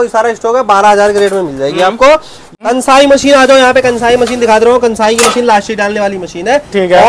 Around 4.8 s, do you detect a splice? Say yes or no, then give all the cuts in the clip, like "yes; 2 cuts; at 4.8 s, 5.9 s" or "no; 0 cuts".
no; 1 cut; at 2.4 s